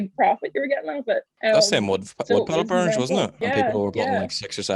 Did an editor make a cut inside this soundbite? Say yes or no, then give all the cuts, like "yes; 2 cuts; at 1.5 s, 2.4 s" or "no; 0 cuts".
yes; 2 cuts; at 1.3 s, 3.3 s